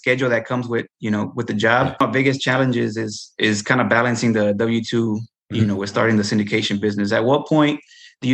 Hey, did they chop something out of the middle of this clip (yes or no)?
yes